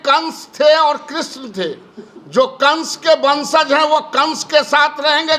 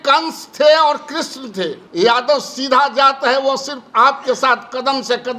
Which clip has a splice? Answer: second; 1 cut; at 1.8 s

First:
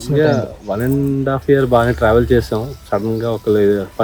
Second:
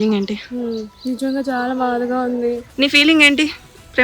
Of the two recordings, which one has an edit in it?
second; 1 cut; at 2.7 s

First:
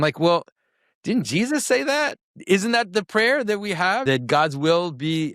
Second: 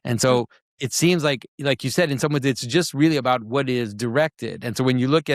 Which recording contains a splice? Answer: first; 2 cuts; at 2.3 s, 4.0 s

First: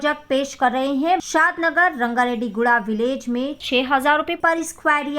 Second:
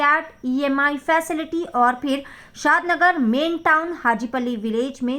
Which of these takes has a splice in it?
first; 1 cut; at 1.2 s

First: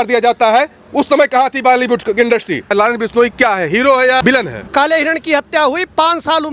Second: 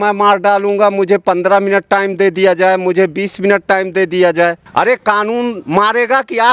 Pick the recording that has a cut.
first; 2 cuts; at 2.6 s, 4.4 s

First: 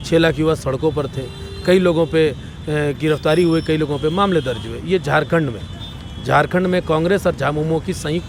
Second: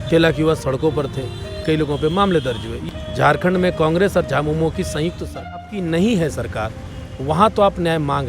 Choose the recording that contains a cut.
second; 3 cuts; at 1.6 s, 2.7 s, 5.6 s

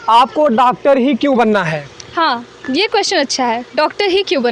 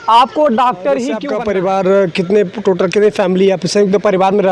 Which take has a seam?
second; 1 cut; at 1.2 s

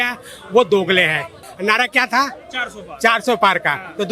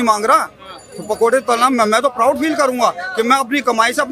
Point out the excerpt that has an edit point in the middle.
first; 1 cut; at 1.5 s

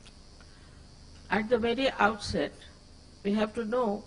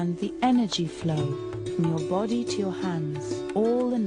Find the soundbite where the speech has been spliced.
second; 1 cut; at 3.0 s

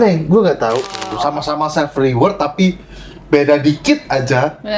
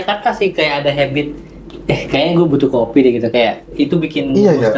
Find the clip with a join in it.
first; 1 cut; at 1.1 s

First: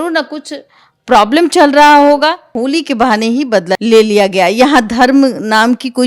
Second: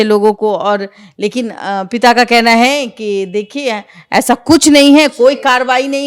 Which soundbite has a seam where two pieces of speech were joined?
first; 2 cuts; at 2.5 s, 3.8 s

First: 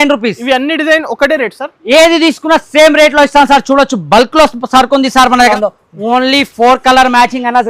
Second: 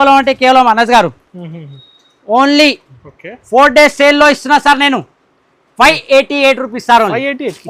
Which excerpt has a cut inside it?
first; 1 cut; at 5.5 s

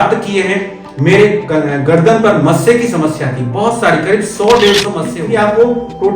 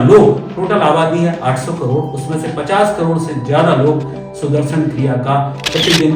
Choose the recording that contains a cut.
first; 1 cut; at 5.1 s

